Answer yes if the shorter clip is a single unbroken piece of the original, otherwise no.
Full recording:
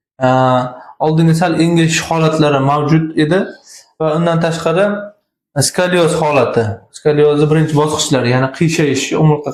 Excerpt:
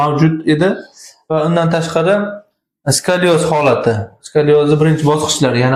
yes